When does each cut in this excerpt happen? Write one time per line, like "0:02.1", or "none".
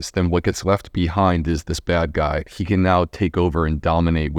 0:02.5